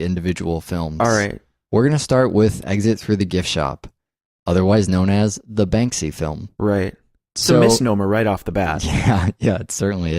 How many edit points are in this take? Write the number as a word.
one